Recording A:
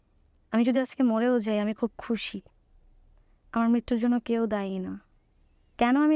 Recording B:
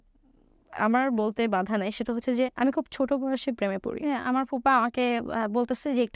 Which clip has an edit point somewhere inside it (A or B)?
B